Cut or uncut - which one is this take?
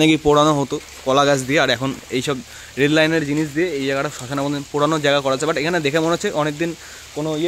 uncut